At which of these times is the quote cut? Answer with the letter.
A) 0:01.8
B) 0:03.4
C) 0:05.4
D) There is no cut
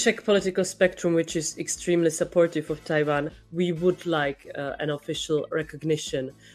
B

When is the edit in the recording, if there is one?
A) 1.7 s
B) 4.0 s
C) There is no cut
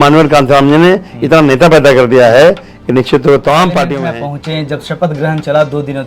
B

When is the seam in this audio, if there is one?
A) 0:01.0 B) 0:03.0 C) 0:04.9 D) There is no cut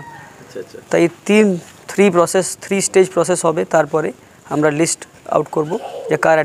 D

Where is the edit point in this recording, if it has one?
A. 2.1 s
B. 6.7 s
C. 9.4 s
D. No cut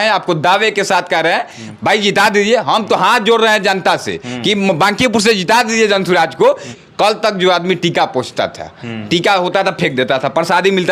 B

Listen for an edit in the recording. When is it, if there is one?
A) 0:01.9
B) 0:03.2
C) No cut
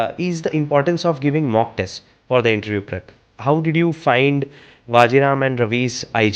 B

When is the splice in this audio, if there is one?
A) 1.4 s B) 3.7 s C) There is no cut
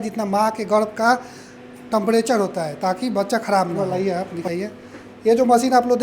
B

